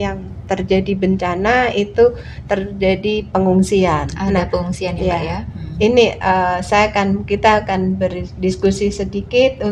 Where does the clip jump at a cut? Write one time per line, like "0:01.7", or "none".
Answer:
none

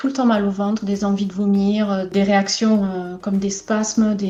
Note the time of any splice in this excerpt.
none

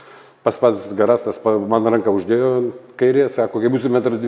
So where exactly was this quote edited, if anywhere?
none

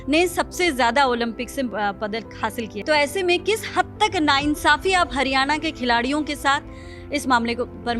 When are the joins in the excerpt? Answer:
0:02.8

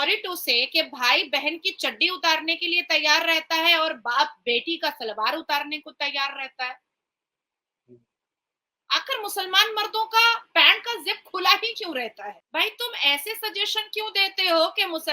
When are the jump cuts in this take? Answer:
0:12.4

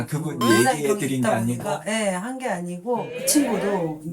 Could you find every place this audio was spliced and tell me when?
0:03.0

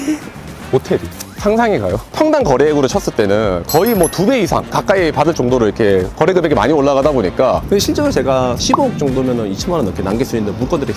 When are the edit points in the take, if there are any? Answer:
0:02.0
0:07.6

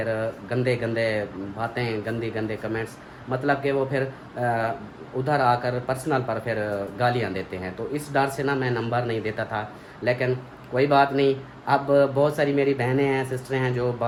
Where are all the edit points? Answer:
none

